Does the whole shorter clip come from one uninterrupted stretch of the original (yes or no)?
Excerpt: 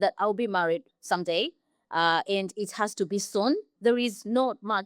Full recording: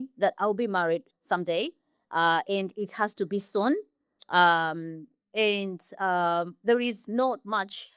no